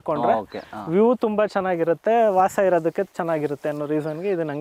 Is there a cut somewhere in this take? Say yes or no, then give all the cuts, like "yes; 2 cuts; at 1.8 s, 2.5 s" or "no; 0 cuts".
no; 0 cuts